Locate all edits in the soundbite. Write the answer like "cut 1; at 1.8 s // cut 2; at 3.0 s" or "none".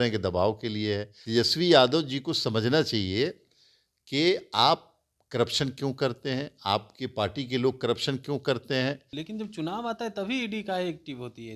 cut 1; at 1.1 s // cut 2; at 9.1 s